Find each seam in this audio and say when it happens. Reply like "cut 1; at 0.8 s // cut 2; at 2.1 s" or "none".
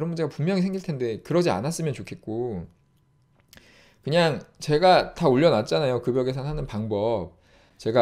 none